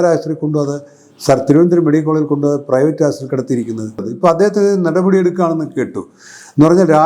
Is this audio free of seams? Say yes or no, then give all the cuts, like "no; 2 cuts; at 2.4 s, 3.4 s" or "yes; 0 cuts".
no; 1 cut; at 4.0 s